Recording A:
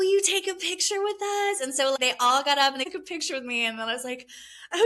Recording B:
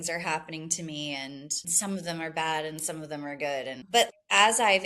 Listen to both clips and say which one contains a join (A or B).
B